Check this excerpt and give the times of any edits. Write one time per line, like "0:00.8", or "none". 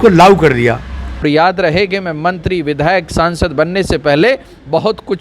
0:01.1